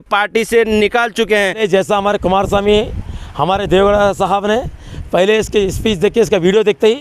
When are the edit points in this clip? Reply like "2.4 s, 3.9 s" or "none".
1.6 s